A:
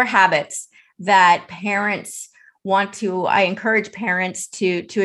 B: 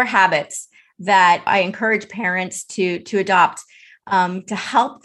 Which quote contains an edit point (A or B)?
B